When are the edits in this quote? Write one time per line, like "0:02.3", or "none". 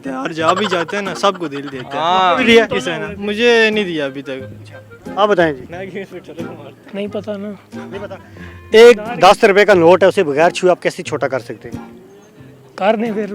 none